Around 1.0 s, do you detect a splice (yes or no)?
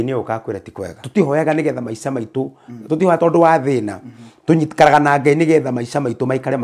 yes